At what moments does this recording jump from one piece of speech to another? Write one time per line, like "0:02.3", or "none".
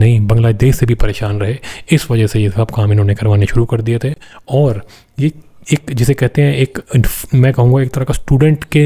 none